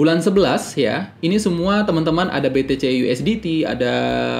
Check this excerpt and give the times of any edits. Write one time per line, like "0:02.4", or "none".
none

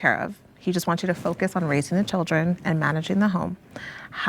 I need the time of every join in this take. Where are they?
none

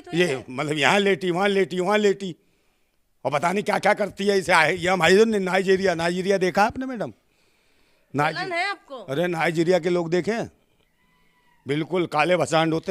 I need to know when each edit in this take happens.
none

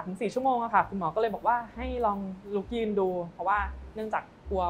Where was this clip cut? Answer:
none

